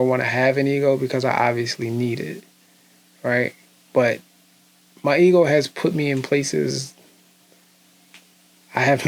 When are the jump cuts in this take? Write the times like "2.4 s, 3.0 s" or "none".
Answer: none